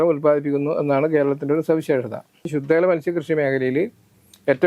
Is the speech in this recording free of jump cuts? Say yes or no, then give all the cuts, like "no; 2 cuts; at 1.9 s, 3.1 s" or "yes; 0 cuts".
no; 1 cut; at 2.5 s